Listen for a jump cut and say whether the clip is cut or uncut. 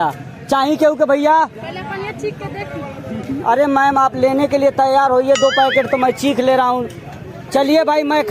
cut